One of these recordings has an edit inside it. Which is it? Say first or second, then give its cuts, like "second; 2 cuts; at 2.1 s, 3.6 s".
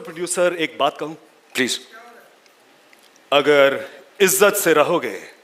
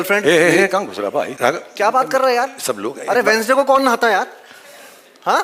second; 1 cut; at 1.3 s